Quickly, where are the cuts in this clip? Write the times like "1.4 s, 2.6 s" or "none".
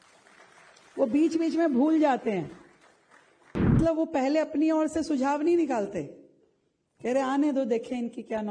3.8 s